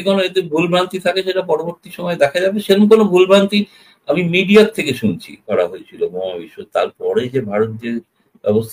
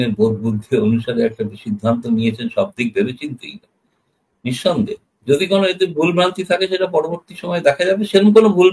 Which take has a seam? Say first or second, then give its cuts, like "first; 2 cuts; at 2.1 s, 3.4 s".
first; 1 cut; at 5.5 s